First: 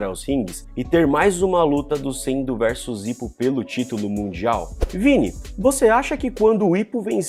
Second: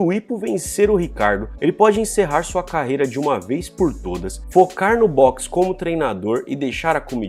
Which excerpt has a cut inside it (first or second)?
first